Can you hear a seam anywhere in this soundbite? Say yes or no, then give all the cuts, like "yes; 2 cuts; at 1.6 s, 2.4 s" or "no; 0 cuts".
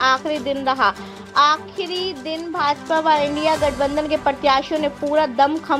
no; 0 cuts